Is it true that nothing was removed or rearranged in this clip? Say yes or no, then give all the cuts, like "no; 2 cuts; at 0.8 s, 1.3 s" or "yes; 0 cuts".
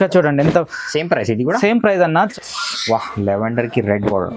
no; 1 cut; at 2.3 s